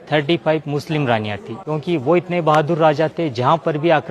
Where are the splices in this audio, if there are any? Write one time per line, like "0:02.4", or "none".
0:01.5

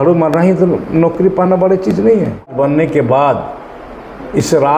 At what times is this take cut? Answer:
0:02.5

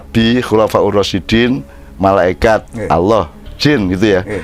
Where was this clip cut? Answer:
none

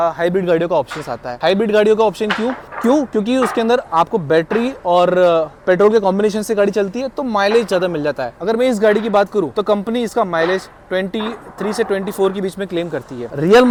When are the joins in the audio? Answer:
none

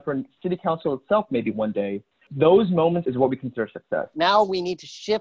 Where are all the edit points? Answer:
0:02.3
0:03.0
0:04.1

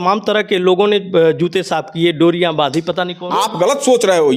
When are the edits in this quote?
0:03.1

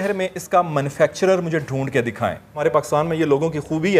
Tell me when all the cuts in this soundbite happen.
0:02.6

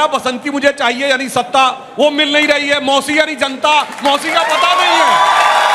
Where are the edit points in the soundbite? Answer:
none

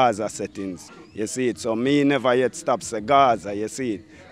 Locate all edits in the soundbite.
none

